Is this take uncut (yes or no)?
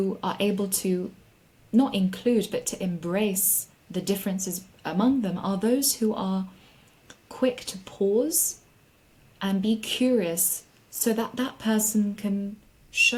yes